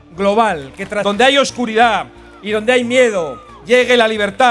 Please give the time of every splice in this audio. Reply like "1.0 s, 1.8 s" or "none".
1.0 s

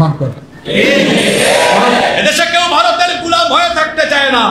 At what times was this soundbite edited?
1.4 s

